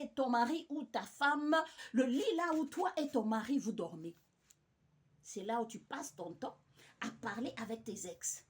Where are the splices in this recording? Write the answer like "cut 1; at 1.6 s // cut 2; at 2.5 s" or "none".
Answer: cut 1; at 1.8 s